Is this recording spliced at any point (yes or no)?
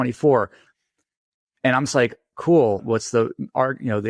yes